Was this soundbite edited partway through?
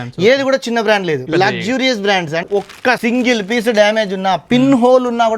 yes; 2 cuts; at 1.2 s, 2.5 s

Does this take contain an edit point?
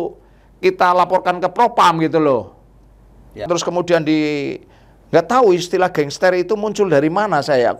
yes; 1 cut; at 3.5 s

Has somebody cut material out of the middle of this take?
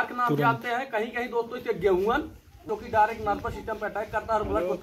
yes; 1 cut; at 2.6 s

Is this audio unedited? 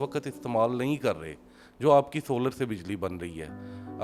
yes; 0 cuts

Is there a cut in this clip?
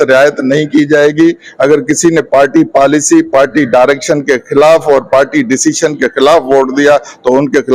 no; 0 cuts

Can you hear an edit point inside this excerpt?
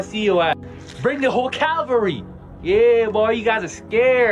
no; 0 cuts

